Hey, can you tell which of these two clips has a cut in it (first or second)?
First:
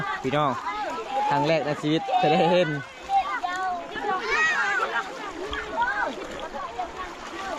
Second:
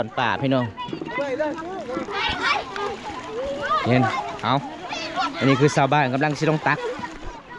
second